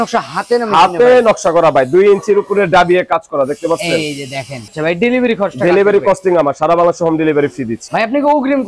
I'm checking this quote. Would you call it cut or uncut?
cut